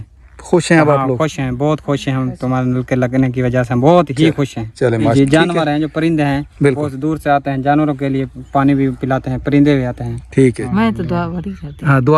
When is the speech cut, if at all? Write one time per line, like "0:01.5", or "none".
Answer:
0:05.1
0:10.6